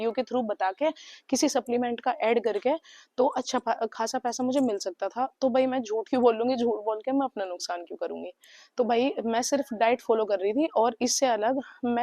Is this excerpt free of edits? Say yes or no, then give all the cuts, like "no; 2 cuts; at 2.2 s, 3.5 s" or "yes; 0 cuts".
yes; 0 cuts